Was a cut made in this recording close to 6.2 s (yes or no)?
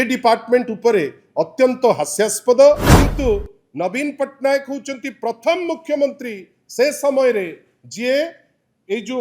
no